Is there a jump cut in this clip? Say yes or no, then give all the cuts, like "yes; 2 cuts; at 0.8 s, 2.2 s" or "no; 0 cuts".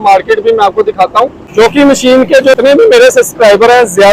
yes; 2 cuts; at 1.3 s, 2.6 s